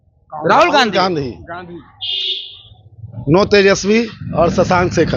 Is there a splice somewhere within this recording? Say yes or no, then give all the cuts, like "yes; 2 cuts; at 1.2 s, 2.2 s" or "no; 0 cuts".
no; 0 cuts